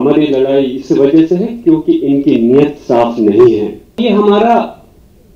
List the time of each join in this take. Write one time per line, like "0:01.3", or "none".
0:04.0